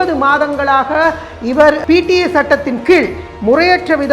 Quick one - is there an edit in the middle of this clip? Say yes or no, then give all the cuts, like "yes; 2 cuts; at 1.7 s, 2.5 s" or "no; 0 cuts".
yes; 1 cut; at 1.8 s